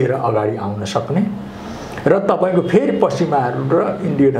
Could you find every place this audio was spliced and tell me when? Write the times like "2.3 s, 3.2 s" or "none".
none